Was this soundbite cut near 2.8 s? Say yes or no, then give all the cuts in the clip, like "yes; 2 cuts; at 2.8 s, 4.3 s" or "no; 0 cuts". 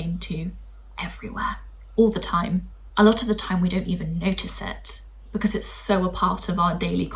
yes; 1 cut; at 2.8 s